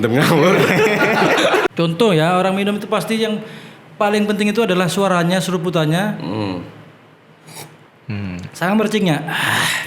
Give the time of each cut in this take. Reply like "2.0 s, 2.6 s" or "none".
1.7 s